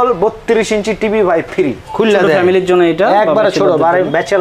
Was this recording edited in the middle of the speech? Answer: yes; 1 cut; at 1.8 s

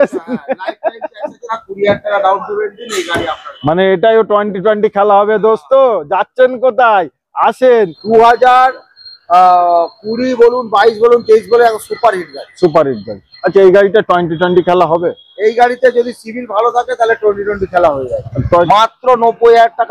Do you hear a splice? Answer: yes; 3 cuts; at 1.4 s, 8.0 s, 18.7 s

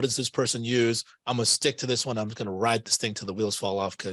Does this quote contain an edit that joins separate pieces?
no; 0 cuts

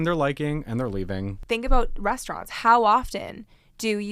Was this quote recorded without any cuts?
no; 1 cut; at 1.4 s

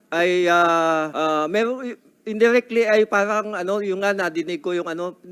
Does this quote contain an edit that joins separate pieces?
yes; 1 cut; at 1.1 s

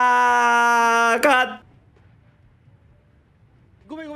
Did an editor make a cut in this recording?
yes; 1 cut; at 1.5 s

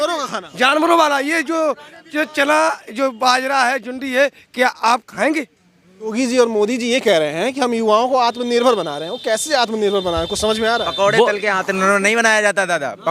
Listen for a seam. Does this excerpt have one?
yes; 1 cut; at 6.1 s

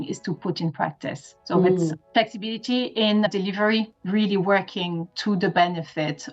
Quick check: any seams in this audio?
yes; 1 cut; at 4.0 s

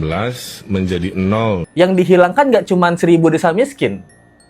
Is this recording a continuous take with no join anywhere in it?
no; 1 cut; at 1.7 s

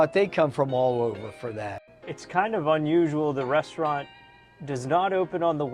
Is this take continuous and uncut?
no; 1 cut; at 1.8 s

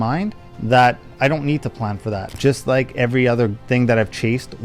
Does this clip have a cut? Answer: yes; 1 cut; at 2.4 s

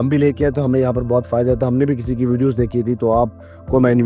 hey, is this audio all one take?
yes; 0 cuts

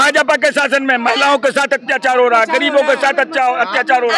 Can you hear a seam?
no; 0 cuts

